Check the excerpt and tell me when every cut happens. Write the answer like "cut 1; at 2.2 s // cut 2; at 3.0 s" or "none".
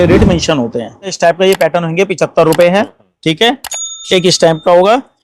cut 1; at 1.1 s

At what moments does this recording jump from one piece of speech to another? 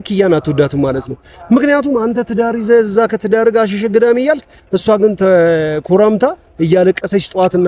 none

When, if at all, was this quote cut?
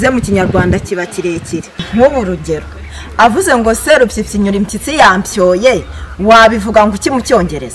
cut 1; at 1.8 s

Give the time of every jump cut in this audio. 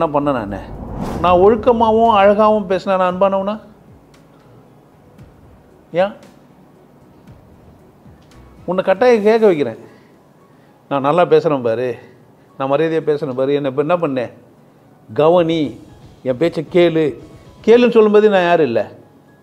cut 1; at 1.0 s

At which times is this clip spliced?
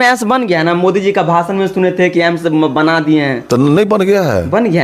none

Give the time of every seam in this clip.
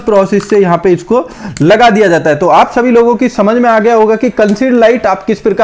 none

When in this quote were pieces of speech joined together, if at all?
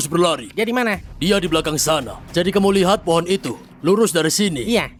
none

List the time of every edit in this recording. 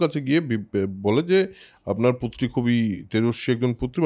none

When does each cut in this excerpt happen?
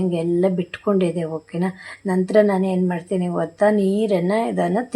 none

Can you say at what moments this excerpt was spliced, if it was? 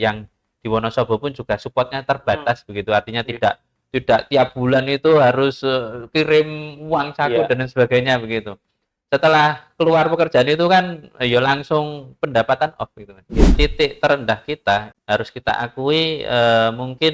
cut 1; at 13.5 s // cut 2; at 14.9 s

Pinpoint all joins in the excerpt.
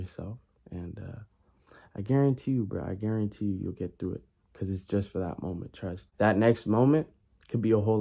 cut 1; at 6.0 s

